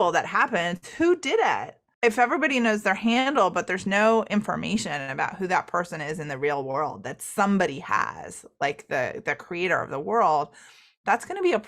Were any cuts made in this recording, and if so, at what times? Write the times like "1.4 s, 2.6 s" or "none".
1.9 s